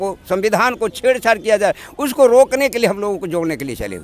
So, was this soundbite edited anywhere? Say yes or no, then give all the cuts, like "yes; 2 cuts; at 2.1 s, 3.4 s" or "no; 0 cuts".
no; 0 cuts